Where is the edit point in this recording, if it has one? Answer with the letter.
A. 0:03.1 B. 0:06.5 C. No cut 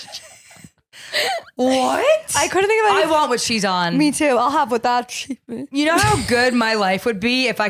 C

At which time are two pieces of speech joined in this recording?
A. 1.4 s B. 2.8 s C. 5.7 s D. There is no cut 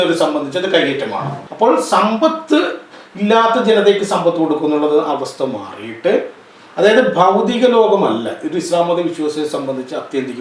A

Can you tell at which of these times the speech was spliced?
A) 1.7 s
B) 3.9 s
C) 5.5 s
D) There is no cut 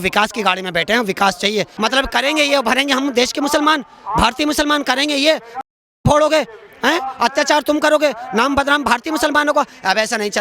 A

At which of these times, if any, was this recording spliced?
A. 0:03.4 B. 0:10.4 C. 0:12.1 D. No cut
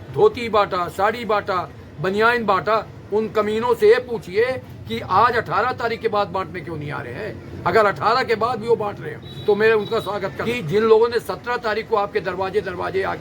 B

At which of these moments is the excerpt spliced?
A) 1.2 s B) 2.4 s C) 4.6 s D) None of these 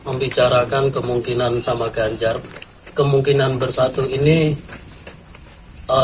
B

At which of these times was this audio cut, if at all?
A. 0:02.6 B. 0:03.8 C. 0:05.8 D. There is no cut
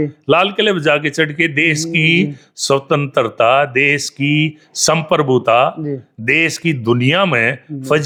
D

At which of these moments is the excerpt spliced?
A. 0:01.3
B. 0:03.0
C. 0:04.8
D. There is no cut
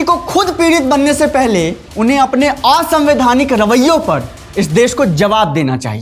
D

